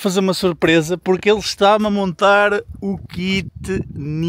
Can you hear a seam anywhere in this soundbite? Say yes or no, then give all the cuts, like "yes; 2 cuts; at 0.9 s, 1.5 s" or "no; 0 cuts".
no; 0 cuts